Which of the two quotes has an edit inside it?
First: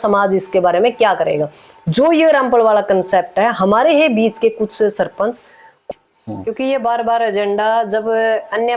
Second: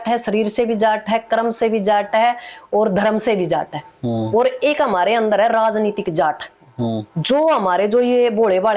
first; 1 cut; at 5.8 s

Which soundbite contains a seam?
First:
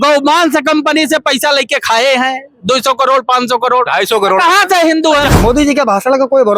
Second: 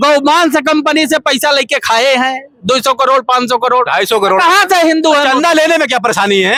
first; 1 cut; at 5.3 s

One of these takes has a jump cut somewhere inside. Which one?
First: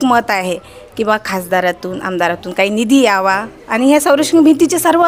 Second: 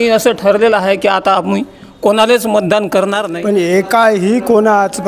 second; 1 cut; at 3.3 s

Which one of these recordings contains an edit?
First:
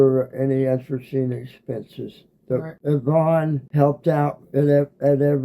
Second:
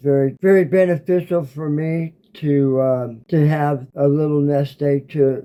first; 1 cut; at 2.8 s

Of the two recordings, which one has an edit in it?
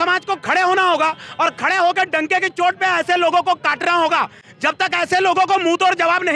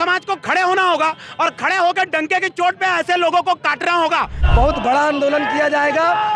second; 1 cut; at 4.4 s

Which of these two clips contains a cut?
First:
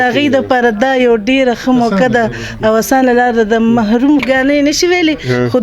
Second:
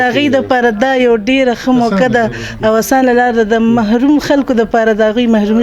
first; 1 cut; at 4.2 s

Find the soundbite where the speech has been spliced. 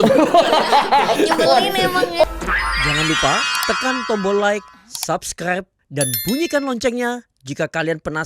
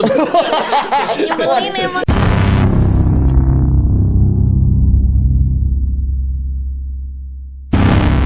first; 1 cut; at 2.1 s

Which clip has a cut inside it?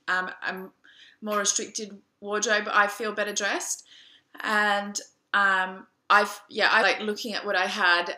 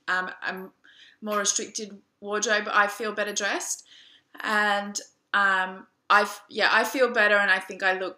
second; 1 cut; at 6.8 s

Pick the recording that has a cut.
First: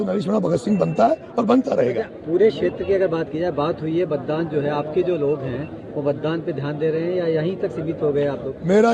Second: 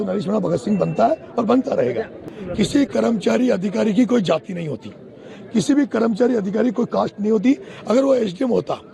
second; 1 cut; at 2.2 s

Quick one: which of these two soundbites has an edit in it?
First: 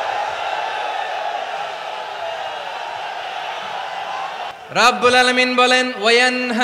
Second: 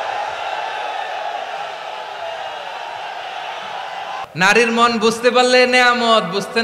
second; 1 cut; at 4.2 s

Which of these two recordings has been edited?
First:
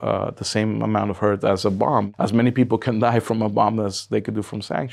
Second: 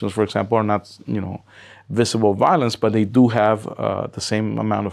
first; 1 cut; at 2.1 s

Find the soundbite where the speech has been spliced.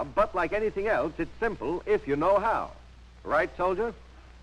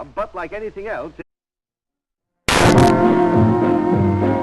first; 1 cut; at 1.3 s

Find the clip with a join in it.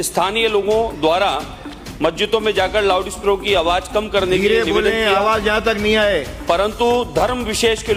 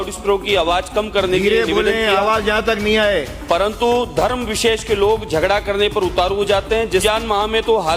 second; 1 cut; at 7.0 s

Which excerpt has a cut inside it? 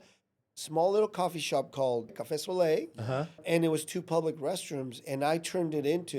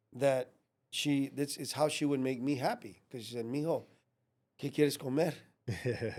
first; 2 cuts; at 2.2 s, 3.4 s

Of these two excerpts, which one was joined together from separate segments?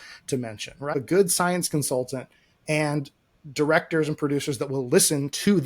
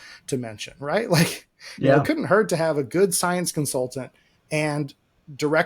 first; 1 cut; at 0.9 s

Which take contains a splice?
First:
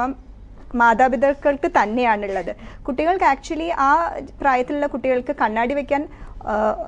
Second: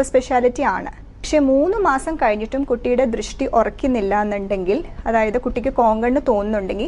second; 1 cut; at 1.3 s

